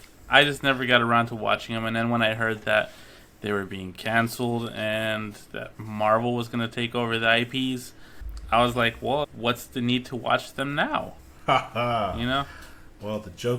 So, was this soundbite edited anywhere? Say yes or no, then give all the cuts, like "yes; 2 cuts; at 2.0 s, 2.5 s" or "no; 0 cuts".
no; 0 cuts